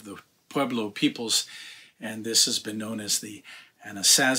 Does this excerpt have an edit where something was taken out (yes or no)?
no